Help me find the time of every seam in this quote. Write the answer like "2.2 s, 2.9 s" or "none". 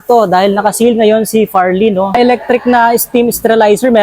2.0 s